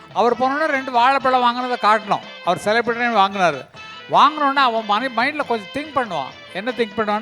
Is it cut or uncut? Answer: uncut